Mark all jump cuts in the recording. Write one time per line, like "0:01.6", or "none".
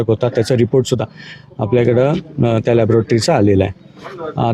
0:01.0